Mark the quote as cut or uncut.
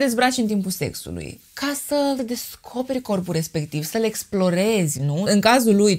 uncut